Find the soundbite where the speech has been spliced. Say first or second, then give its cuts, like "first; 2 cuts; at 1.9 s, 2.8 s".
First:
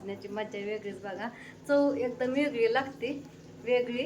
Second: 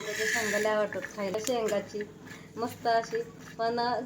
second; 1 cut; at 1.4 s